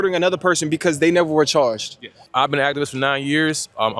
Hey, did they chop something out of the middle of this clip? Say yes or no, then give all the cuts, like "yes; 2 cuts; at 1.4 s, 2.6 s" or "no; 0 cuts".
yes; 1 cut; at 2.1 s